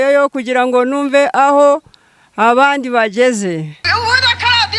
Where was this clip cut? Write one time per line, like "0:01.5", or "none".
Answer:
0:03.9